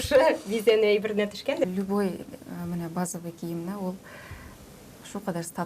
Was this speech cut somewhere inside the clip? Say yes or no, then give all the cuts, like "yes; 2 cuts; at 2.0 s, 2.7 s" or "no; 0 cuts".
yes; 1 cut; at 1.7 s